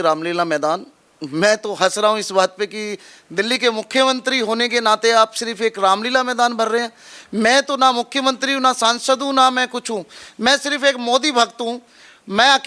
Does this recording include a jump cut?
no; 0 cuts

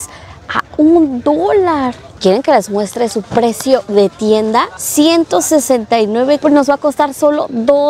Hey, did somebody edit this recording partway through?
yes; 3 cuts; at 2.1 s, 4.8 s, 6.4 s

